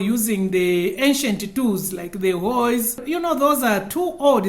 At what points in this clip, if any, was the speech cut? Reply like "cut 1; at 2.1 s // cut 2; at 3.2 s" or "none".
cut 1; at 3.0 s

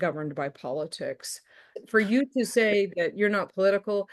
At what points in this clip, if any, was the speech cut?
cut 1; at 1.7 s

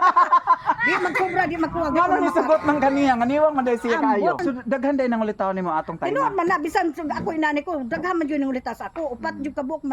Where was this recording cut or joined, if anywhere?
cut 1; at 4.4 s

